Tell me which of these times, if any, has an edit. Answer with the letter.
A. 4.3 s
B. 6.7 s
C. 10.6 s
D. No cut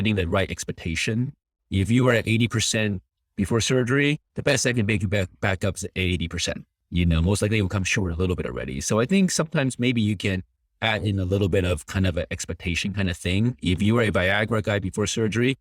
A